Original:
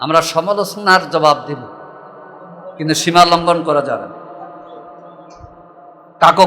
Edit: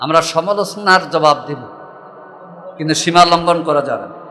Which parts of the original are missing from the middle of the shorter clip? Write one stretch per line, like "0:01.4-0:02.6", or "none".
none